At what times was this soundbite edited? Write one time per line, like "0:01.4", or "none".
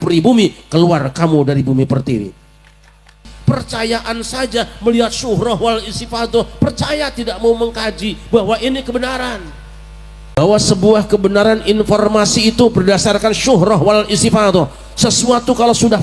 0:03.3
0:10.4